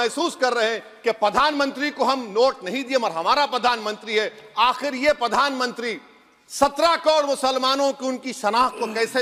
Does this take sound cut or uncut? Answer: uncut